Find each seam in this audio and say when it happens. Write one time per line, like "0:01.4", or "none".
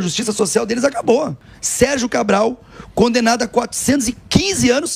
0:01.4